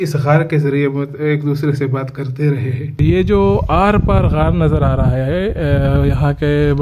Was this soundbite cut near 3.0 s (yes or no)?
yes